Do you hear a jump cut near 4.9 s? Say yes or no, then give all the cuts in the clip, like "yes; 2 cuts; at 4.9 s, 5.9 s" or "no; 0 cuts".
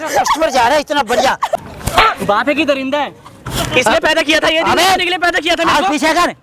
no; 2 cuts; at 1.6 s, 3.5 s